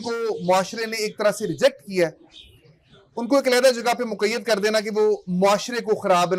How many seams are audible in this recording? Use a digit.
0